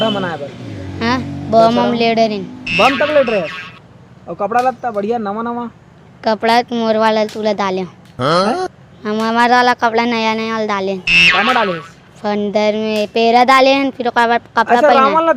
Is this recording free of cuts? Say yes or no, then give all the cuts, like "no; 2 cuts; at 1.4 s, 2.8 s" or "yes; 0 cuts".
yes; 0 cuts